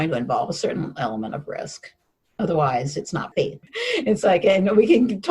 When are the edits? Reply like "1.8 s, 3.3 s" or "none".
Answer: 3.5 s

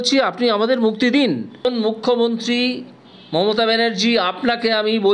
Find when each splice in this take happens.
1.6 s

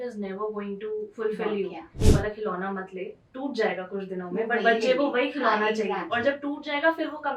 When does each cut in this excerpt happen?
2.0 s

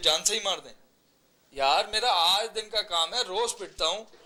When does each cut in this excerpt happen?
none

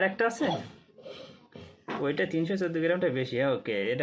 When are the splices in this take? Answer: none

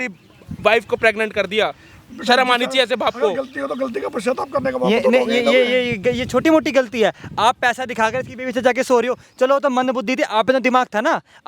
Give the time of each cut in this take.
none

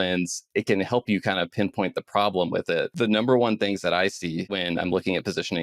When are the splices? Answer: 2.9 s, 4.6 s

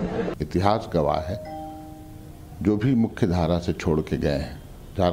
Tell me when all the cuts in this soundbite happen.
2.9 s

